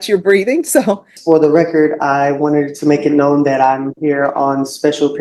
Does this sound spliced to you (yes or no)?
yes